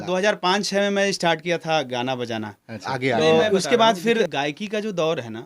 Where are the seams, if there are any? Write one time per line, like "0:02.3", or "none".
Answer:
0:04.3